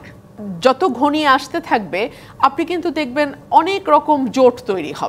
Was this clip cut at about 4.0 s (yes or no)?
no